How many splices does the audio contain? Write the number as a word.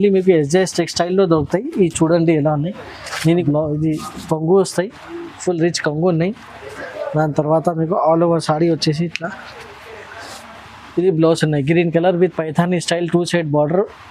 one